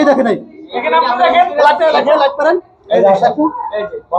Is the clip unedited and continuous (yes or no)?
yes